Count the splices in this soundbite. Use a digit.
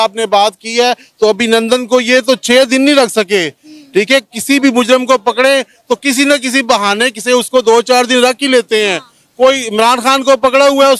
0